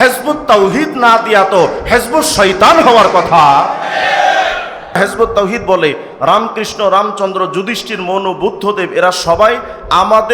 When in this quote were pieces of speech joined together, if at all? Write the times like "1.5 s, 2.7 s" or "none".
5.0 s